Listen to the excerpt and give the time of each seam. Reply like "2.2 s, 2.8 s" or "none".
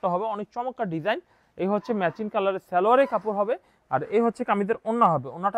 none

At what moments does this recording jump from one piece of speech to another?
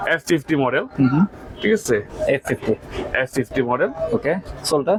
none

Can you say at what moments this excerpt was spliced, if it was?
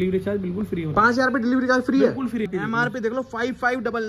2.5 s

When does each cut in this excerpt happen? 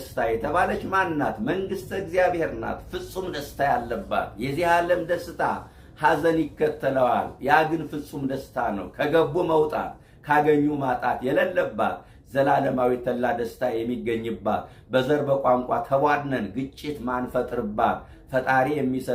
none

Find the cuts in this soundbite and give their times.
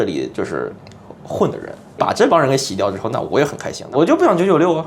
2.0 s, 3.7 s

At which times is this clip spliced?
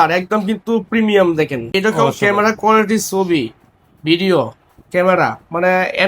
1.7 s

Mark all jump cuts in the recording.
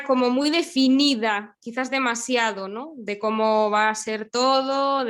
none

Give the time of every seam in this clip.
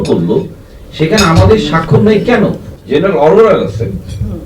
2.7 s

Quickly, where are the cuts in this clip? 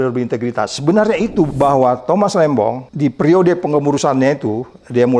1.5 s, 2.9 s

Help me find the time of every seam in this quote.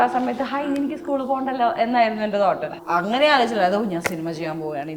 2.8 s

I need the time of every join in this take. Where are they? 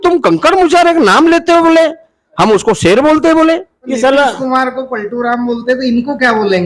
3.8 s

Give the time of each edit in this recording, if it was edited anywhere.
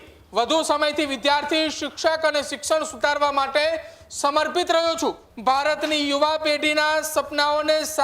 5.3 s

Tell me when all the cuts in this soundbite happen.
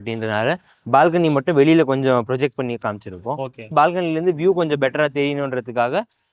3.7 s

